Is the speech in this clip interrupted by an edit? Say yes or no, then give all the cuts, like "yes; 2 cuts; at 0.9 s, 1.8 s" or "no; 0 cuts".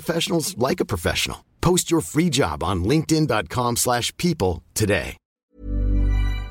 yes; 1 cut; at 5.4 s